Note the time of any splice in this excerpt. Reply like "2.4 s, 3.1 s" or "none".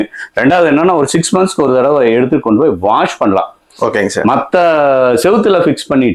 none